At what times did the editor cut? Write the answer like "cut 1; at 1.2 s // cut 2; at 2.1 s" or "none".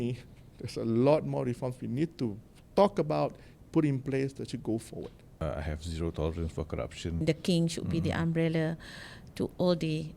cut 1; at 5.4 s // cut 2; at 7.2 s